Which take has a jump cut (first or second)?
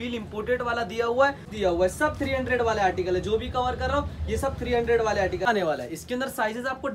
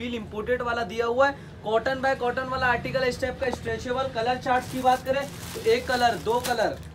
first